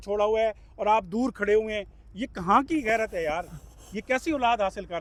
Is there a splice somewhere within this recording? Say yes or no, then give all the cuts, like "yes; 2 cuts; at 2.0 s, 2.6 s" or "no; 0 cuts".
no; 0 cuts